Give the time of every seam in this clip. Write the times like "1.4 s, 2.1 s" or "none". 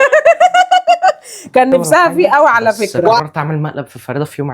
3.2 s